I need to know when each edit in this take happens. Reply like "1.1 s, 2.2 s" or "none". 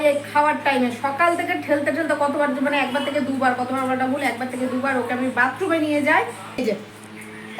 6.6 s